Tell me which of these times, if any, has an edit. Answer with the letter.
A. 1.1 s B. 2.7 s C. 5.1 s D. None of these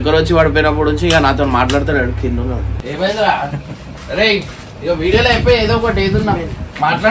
B